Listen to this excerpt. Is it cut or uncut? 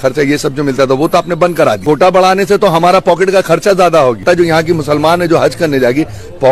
cut